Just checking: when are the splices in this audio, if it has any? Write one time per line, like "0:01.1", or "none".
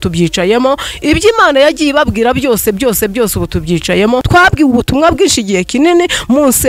0:04.3